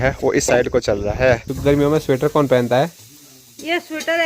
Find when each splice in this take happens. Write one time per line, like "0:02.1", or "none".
0:01.5